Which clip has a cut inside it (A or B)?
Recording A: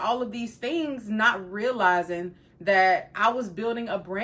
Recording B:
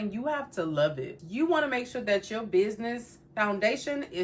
B